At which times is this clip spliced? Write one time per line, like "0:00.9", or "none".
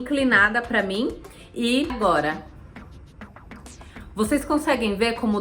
0:02.0